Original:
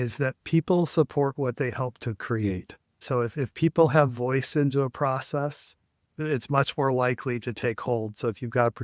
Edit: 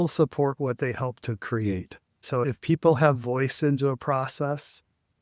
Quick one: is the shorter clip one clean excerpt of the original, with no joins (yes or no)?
no